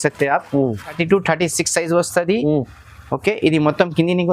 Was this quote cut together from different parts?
yes; 1 cut; at 1.0 s

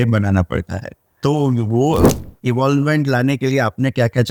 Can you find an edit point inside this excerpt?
no; 0 cuts

